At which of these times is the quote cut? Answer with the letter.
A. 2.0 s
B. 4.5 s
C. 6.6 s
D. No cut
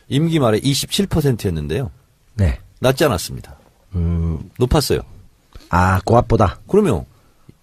B